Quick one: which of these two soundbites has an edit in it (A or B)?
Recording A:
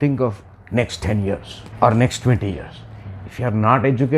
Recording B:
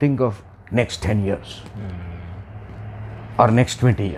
A